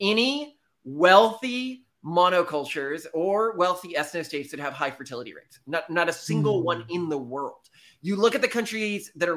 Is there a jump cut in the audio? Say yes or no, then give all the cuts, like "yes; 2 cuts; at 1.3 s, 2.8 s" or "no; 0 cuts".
no; 0 cuts